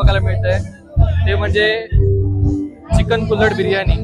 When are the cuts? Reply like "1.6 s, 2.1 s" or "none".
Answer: none